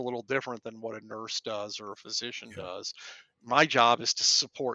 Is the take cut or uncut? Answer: uncut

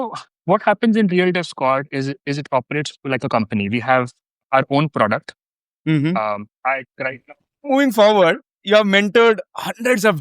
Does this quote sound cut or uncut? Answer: cut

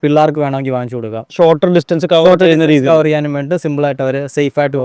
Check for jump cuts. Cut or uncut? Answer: uncut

